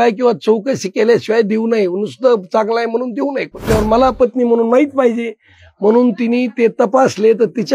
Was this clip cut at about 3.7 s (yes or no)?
yes